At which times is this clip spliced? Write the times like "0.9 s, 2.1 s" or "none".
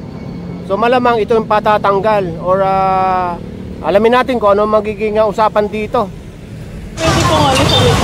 7.0 s